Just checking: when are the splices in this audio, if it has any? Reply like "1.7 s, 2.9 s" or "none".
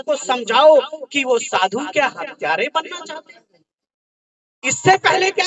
none

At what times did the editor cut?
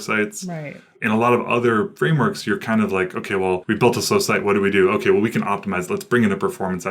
1.9 s, 3.6 s

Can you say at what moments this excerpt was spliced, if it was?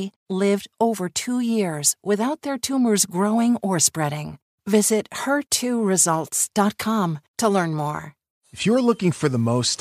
8.3 s

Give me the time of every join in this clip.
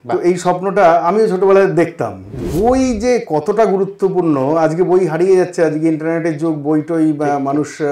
2.3 s

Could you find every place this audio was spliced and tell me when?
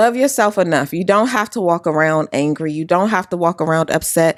none

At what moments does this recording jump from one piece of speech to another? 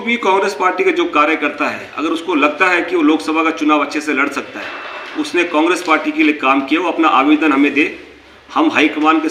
none

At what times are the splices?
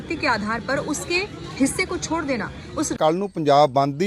2.9 s

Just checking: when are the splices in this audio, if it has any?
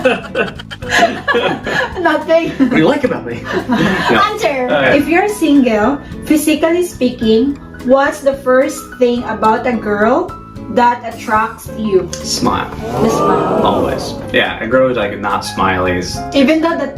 4.9 s

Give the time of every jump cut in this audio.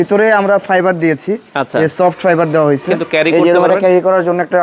3.1 s

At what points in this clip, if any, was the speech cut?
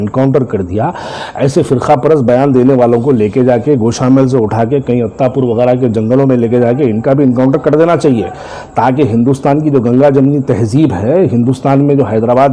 none

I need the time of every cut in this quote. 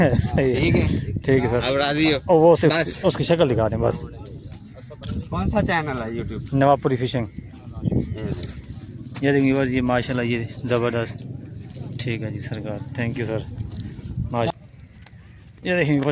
14.5 s

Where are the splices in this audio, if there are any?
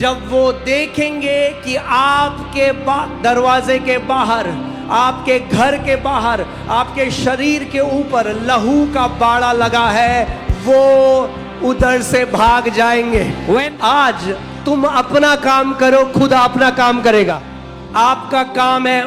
13.7 s, 17.4 s

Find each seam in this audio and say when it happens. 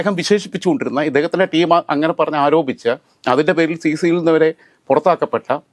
none

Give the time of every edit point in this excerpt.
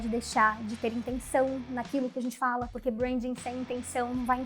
2.7 s

